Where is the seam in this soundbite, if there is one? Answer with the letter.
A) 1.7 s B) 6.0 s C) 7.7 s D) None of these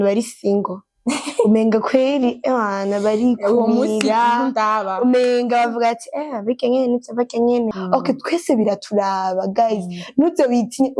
C